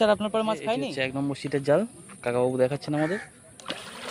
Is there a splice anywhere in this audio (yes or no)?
yes